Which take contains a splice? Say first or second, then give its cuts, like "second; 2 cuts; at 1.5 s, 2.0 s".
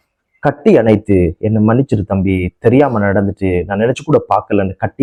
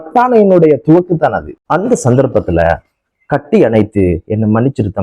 second; 1 cut; at 1.6 s